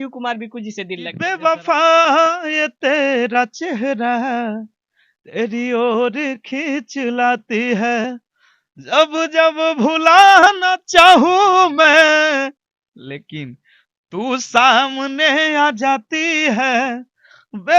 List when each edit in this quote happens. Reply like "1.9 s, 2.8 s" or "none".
1.4 s